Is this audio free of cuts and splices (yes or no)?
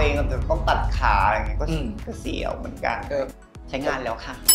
no